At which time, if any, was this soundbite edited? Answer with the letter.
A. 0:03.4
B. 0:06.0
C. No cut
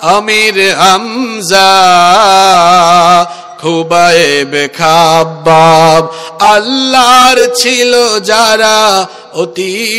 C